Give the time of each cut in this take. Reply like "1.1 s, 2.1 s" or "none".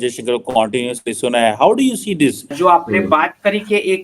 2.5 s